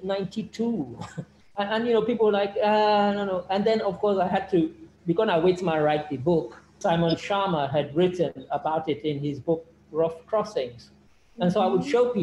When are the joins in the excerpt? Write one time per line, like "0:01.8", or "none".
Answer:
0:01.4
0:06.8

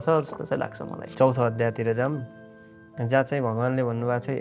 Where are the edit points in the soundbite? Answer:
0:01.0

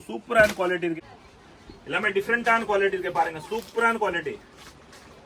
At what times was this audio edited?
0:01.0

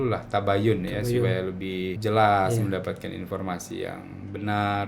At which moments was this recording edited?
0:02.0

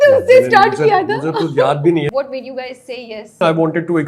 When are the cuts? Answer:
0:02.1
0:03.4

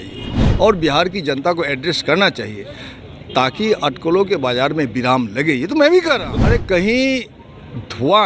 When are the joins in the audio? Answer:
0:06.3

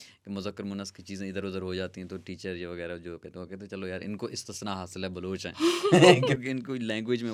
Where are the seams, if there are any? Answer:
none

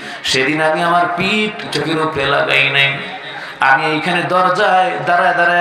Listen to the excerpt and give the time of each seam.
0:01.7

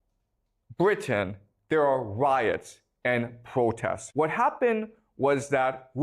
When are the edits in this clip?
0:04.0

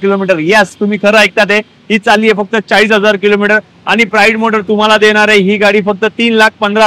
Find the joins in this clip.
none

